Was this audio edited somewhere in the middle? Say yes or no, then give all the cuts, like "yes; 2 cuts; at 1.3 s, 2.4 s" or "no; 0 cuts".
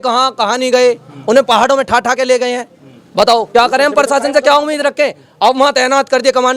no; 0 cuts